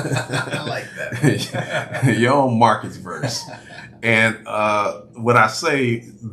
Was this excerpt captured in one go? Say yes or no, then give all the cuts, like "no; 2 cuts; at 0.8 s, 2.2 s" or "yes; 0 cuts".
yes; 0 cuts